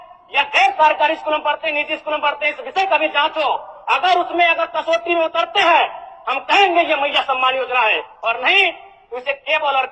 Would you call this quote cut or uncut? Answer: uncut